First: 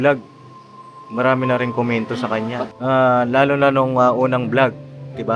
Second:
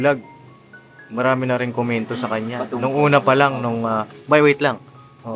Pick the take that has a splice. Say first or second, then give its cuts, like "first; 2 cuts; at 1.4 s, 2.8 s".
first; 1 cut; at 2.7 s